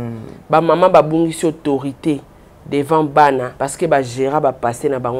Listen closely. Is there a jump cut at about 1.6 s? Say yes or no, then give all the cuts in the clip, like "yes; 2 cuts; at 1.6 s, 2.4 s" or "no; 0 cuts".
no; 1 cut; at 3.6 s